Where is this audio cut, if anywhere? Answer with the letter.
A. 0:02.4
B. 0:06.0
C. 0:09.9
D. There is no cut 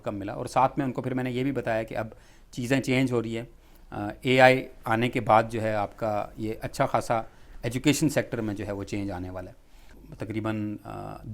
C